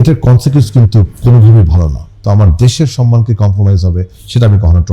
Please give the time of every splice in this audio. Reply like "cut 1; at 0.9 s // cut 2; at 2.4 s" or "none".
cut 1; at 2.1 s